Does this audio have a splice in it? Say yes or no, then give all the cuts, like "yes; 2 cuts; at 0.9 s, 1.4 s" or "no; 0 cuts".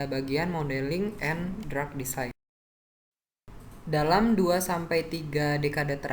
yes; 1 cut; at 2.3 s